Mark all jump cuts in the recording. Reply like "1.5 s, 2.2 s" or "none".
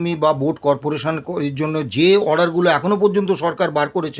none